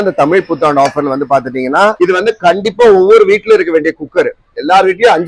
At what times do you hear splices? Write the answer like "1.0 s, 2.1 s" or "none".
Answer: 1.9 s